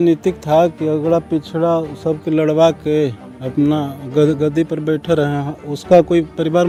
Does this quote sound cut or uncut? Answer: uncut